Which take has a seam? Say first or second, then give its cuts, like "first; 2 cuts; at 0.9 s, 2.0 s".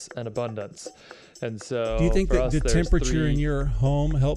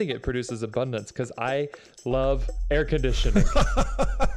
first; 1 cut; at 2.0 s